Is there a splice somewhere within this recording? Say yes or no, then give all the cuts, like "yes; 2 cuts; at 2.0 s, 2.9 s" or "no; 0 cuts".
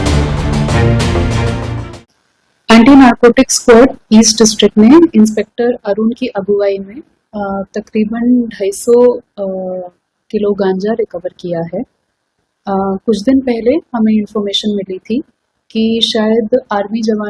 yes; 1 cut; at 2.0 s